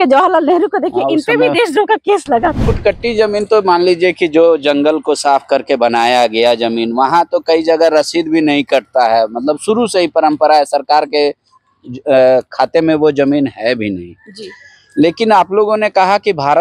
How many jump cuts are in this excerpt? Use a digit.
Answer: 1